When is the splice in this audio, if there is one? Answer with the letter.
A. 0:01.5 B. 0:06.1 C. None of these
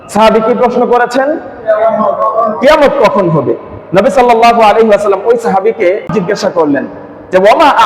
B